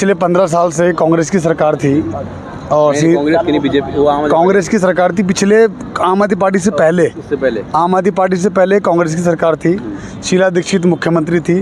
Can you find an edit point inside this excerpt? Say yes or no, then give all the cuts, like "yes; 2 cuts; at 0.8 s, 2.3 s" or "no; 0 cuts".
no; 0 cuts